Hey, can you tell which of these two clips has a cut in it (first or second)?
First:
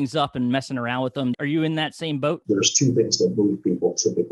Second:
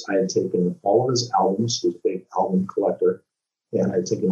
first